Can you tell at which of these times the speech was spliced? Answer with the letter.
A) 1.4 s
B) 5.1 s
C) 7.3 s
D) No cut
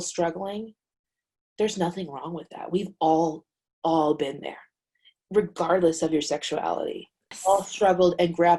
C